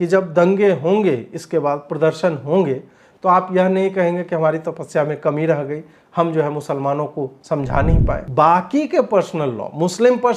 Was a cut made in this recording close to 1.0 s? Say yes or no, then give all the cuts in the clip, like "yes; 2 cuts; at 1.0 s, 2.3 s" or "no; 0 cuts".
no; 1 cut; at 8.3 s